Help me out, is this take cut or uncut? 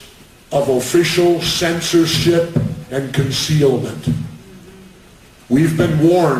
uncut